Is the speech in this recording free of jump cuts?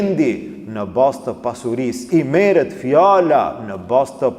no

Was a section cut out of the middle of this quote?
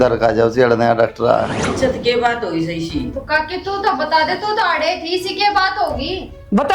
yes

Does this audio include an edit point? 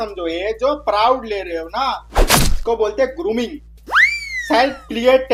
no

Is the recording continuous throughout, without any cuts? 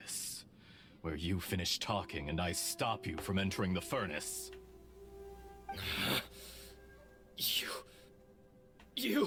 yes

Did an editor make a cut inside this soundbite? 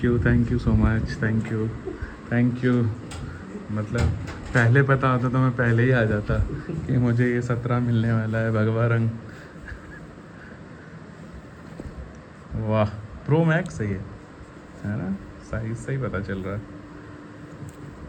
no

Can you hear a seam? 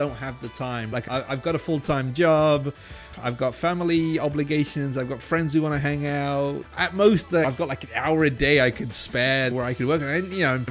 yes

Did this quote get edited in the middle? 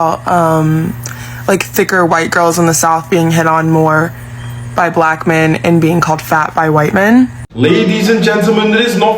yes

